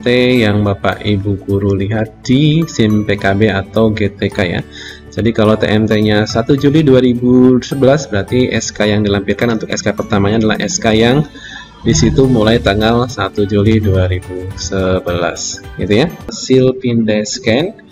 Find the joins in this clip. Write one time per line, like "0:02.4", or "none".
0:16.4